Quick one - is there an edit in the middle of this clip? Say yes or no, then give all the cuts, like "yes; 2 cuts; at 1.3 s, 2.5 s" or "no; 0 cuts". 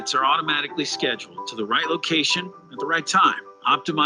yes; 1 cut; at 2.0 s